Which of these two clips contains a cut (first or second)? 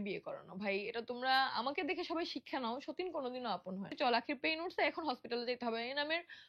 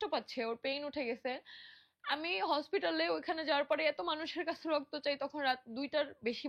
first